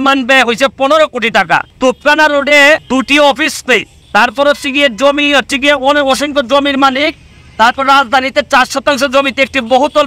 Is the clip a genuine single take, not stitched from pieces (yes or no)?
no